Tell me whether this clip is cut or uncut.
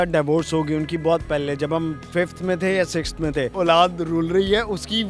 cut